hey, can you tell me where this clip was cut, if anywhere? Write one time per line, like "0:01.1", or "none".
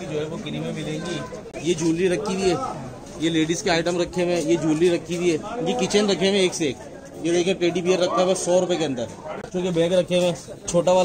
0:01.4
0:09.5